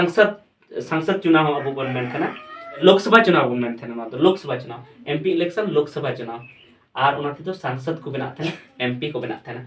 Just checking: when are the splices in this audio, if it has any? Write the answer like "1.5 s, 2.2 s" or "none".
2.8 s